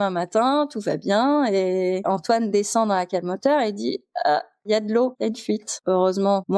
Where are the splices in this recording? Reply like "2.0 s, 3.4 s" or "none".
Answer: 2.0 s, 4.6 s, 5.8 s